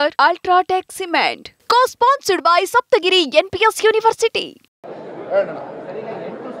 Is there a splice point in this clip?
yes; 1 cut; at 4.8 s

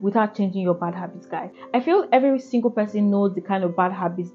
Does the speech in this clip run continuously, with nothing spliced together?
yes; 0 cuts

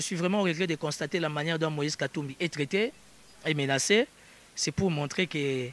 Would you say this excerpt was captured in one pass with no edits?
yes; 0 cuts

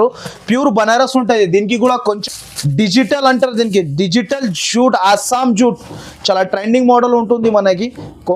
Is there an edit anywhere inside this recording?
yes; 1 cut; at 2.0 s

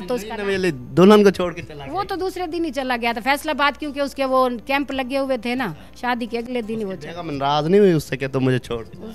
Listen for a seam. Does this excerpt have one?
no; 0 cuts

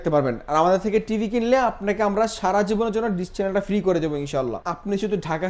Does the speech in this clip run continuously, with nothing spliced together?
no; 1 cut; at 4.5 s

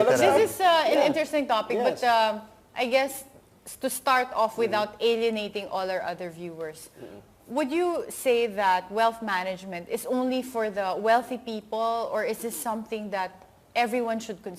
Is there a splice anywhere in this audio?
yes; 1 cut; at 1.1 s

